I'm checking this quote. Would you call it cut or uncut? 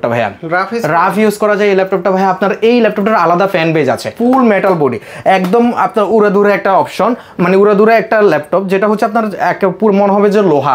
cut